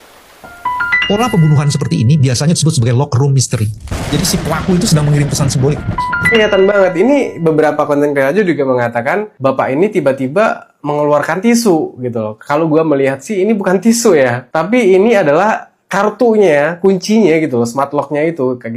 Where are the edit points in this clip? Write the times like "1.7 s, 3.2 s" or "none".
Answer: none